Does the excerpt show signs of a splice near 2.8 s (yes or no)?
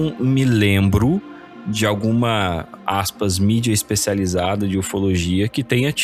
no